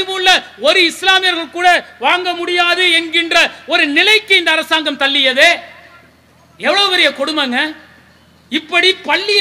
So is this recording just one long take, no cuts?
yes; 0 cuts

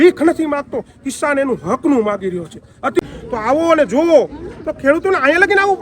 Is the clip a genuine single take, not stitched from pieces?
no; 1 cut; at 3.0 s

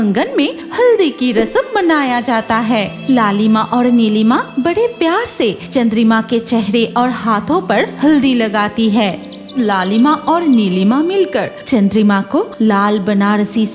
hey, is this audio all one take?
no; 2 cuts; at 9.5 s, 12.5 s

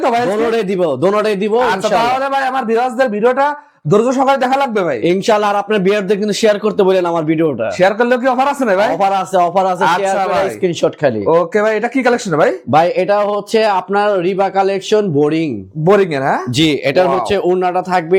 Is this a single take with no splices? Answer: yes; 0 cuts

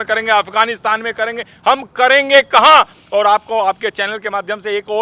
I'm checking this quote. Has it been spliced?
no; 0 cuts

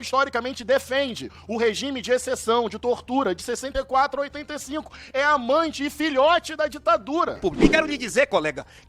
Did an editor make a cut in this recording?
yes; 1 cut; at 7.4 s

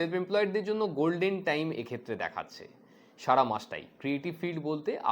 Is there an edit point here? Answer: no; 0 cuts

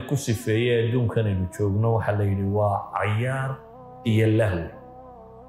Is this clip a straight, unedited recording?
yes; 0 cuts

